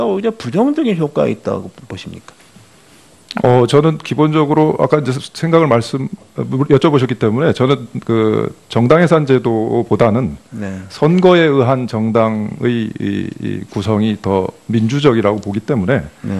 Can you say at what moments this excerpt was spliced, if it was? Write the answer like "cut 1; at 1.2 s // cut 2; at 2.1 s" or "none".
none